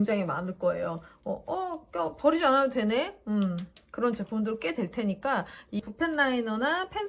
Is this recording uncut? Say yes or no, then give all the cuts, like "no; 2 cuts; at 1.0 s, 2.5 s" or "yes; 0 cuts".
yes; 0 cuts